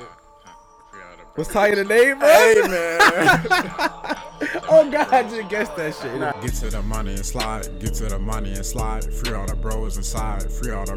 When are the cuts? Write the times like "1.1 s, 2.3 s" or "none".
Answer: 6.3 s